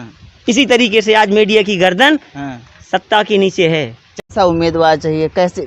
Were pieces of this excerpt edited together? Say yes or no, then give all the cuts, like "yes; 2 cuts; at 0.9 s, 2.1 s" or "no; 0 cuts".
yes; 1 cut; at 4.3 s